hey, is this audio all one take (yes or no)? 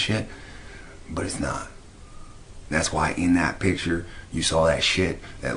yes